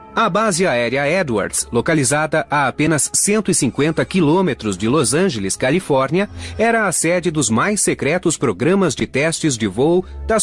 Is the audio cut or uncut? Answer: uncut